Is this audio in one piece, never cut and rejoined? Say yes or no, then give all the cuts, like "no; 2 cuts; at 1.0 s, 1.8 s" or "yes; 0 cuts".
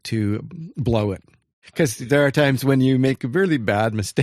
no; 1 cut; at 1.6 s